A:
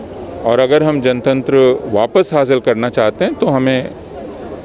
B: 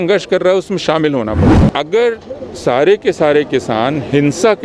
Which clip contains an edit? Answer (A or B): B